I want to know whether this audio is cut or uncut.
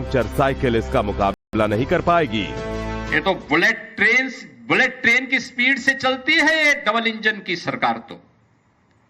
uncut